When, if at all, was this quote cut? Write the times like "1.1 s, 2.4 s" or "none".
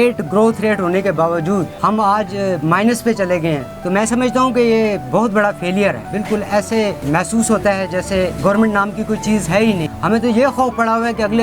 1.7 s, 3.7 s, 6.1 s, 7.0 s, 8.3 s, 9.9 s

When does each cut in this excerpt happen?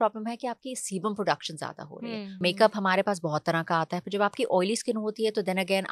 2.4 s

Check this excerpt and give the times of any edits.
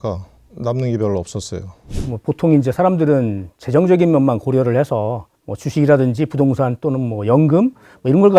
1.9 s

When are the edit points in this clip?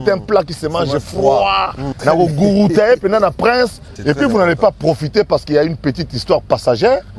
1.8 s, 3.9 s

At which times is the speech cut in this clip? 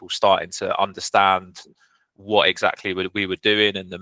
none

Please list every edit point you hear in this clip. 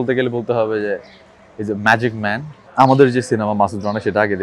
2.6 s

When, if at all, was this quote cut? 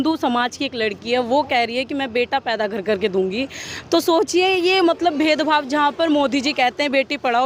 none

